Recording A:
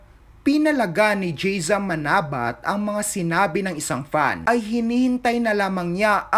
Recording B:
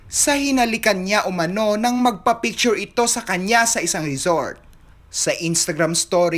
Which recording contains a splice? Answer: A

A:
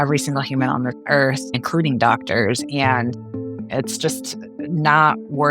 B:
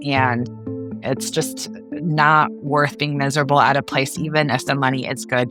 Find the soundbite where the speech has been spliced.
A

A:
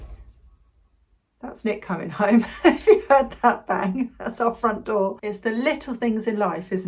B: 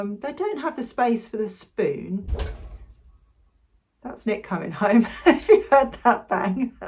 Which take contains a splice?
A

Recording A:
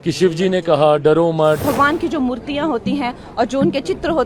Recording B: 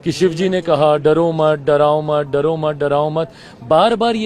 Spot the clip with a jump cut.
A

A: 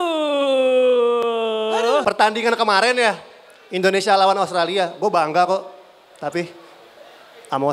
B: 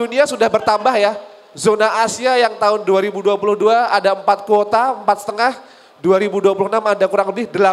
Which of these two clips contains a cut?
A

